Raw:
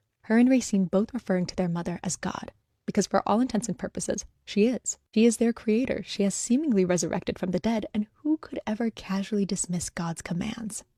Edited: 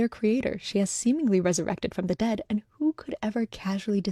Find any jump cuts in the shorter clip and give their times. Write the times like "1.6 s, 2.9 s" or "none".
none